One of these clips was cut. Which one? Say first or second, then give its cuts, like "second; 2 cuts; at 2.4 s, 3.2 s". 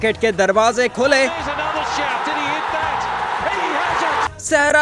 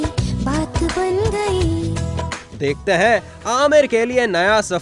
second; 1 cut; at 2.4 s